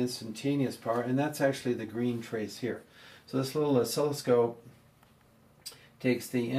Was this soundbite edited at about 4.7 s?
yes; 1 cut; at 4.7 s

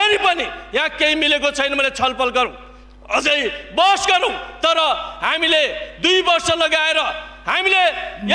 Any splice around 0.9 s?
no; 0 cuts

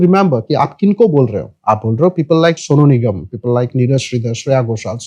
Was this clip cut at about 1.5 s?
yes; 2 cuts; at 1.5 s, 2.6 s

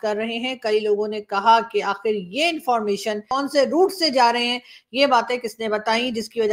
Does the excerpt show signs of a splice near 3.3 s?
yes; 1 cut; at 3.3 s

